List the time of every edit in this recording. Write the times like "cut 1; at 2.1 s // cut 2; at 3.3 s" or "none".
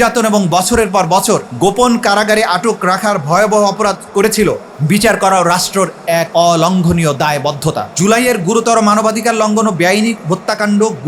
cut 1; at 1.5 s // cut 2; at 4.7 s // cut 3; at 6.3 s // cut 4; at 7.9 s